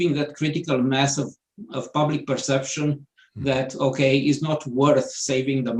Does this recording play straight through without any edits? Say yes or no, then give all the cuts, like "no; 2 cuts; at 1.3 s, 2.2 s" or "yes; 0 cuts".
yes; 0 cuts